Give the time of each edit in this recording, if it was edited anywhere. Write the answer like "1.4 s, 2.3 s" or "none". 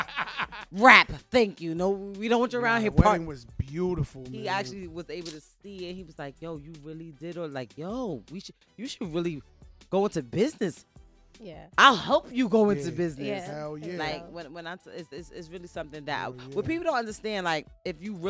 5.1 s

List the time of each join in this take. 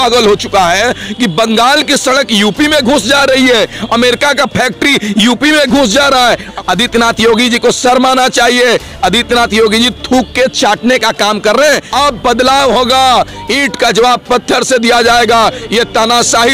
6.5 s, 11.9 s

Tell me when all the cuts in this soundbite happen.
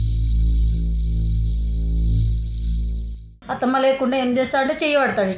3.4 s

